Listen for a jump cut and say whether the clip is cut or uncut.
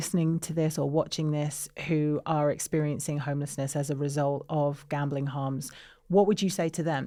uncut